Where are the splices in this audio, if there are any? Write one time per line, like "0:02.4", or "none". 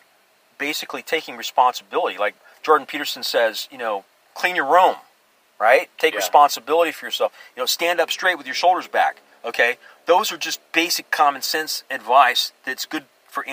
0:02.4
0:04.2